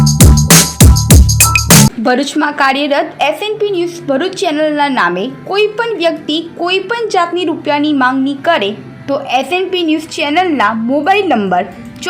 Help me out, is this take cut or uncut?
cut